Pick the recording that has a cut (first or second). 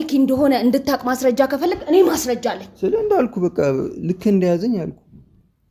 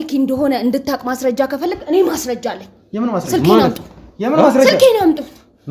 first